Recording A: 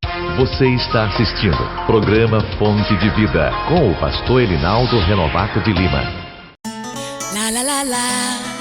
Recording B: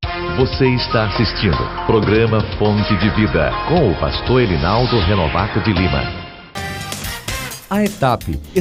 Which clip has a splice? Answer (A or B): A